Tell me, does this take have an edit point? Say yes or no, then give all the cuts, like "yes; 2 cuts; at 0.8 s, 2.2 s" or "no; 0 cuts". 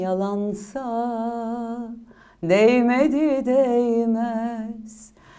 no; 0 cuts